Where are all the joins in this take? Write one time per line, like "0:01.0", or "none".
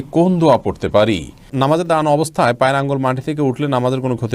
0:01.5